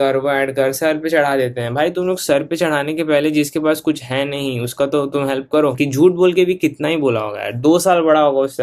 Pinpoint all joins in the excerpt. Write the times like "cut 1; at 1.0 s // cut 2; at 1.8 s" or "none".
cut 1; at 5.8 s